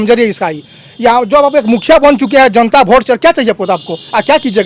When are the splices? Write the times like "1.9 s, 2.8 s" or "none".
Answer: none